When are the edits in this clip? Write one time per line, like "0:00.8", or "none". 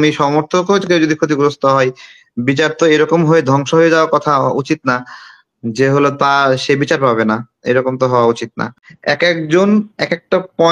0:08.8